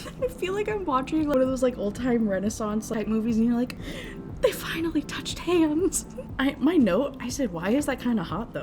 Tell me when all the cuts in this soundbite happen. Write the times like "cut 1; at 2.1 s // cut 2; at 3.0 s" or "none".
cut 1; at 1.3 s // cut 2; at 2.9 s // cut 3; at 6.2 s